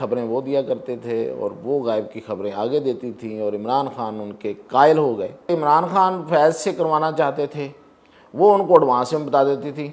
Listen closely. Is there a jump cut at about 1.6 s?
no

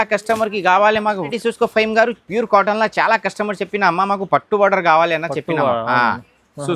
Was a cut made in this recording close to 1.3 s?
yes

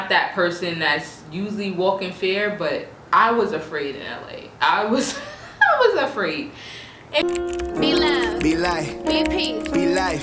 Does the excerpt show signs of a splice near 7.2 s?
yes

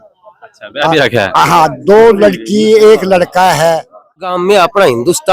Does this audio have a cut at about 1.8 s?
no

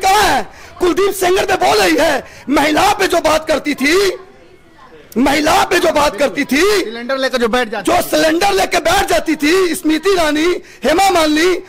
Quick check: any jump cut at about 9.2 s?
no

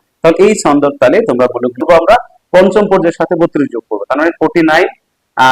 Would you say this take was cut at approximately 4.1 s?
no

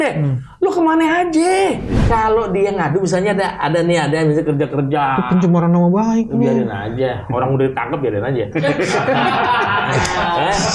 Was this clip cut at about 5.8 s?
no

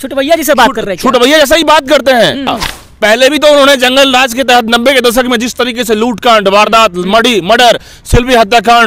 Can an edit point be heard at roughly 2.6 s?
yes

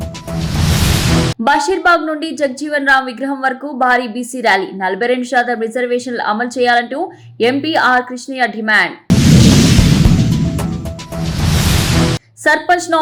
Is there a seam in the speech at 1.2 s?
no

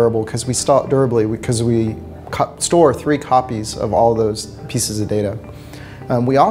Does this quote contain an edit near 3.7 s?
yes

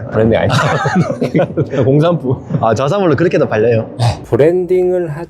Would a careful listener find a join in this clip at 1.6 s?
no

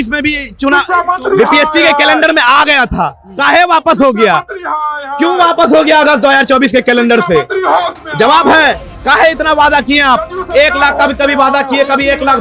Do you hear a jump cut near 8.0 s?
no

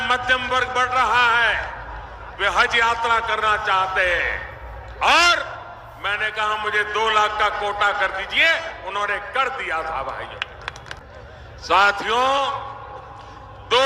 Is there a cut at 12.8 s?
no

